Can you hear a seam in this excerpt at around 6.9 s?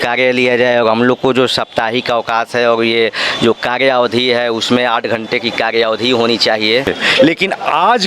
yes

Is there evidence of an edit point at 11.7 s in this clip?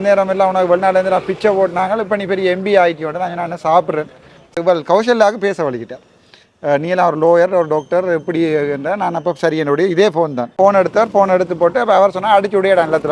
no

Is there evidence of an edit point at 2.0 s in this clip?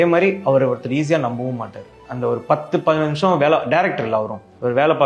no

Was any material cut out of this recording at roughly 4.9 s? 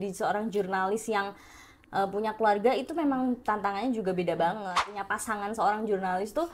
yes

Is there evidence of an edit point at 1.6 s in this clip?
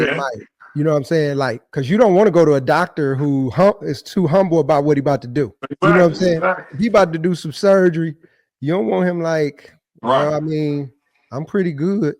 yes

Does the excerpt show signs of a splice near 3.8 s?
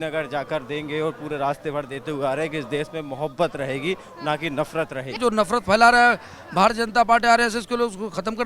no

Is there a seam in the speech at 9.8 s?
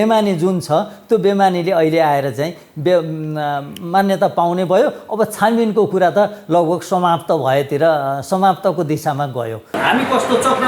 yes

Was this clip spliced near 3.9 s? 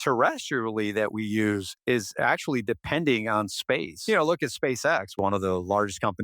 yes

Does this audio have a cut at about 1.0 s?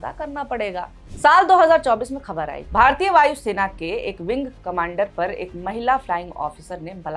yes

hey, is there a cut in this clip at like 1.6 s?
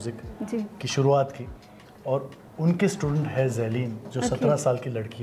no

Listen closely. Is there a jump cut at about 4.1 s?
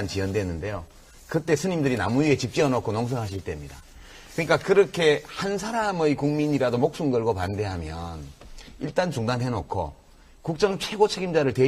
no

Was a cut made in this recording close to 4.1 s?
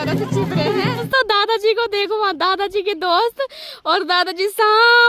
no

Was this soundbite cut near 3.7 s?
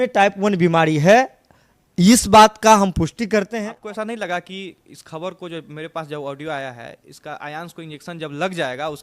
yes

